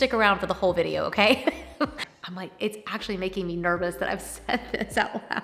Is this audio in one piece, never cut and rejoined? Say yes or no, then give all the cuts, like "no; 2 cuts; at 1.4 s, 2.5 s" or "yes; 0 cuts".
no; 1 cut; at 2.0 s